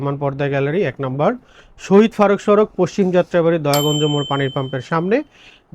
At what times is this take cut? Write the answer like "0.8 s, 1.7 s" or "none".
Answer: none